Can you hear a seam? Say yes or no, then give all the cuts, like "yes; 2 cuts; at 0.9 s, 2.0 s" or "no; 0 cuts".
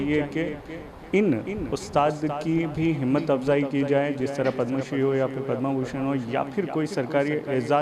no; 0 cuts